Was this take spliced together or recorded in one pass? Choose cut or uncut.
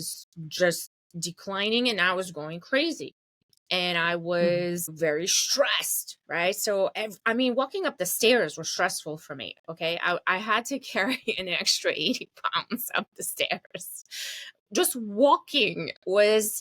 cut